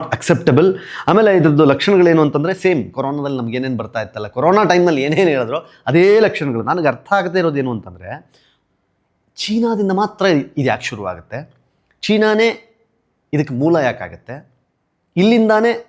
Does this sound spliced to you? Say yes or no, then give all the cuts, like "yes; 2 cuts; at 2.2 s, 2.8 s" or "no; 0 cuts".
no; 0 cuts